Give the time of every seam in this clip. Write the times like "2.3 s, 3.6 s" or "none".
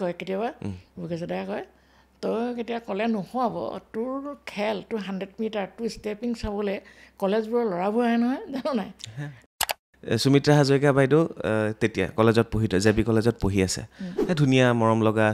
9.4 s